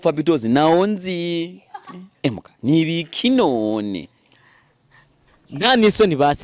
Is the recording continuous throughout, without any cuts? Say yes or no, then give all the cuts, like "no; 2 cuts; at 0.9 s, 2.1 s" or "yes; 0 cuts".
yes; 0 cuts